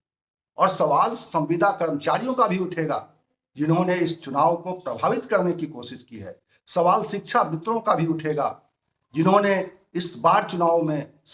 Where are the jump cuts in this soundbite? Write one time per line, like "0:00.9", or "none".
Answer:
none